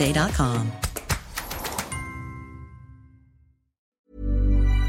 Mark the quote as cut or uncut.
cut